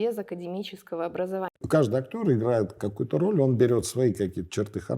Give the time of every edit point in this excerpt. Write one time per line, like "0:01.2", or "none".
0:01.6
0:02.8